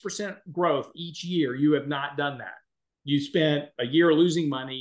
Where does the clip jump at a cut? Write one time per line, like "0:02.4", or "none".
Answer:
none

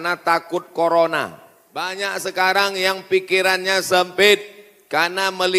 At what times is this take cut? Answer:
0:01.9

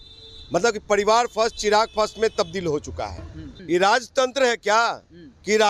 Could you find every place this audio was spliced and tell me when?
0:03.5

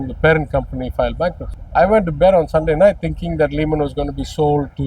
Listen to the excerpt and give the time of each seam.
0:01.5

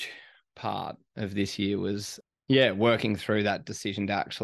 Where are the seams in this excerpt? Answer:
0:02.1

